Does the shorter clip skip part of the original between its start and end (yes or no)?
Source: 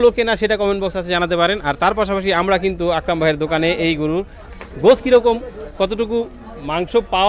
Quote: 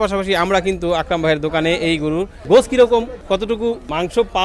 yes